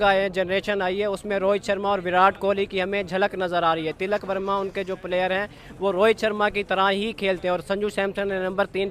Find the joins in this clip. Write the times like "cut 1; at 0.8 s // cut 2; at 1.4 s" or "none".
none

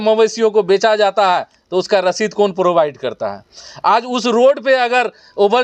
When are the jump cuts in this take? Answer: none

